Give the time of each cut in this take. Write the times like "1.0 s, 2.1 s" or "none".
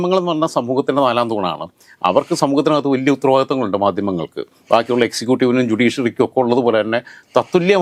none